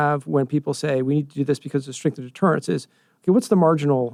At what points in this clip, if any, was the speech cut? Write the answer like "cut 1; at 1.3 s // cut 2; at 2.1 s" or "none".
none